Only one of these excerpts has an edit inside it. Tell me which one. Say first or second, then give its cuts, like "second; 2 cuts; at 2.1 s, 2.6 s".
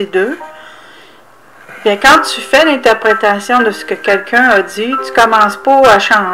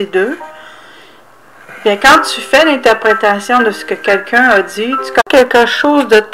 first; 1 cut; at 5.2 s